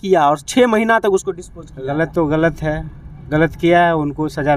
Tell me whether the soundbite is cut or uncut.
uncut